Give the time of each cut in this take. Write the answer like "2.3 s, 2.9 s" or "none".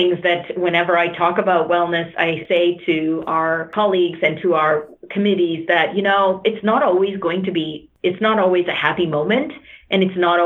2.4 s, 3.7 s, 7.8 s